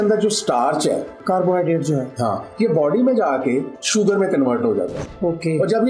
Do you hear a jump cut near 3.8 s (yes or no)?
yes